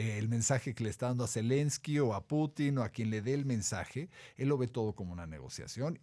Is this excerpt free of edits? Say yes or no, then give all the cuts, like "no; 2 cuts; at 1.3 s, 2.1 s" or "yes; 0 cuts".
yes; 0 cuts